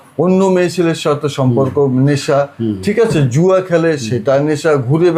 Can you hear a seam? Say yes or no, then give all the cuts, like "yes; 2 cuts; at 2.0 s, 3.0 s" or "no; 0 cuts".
no; 0 cuts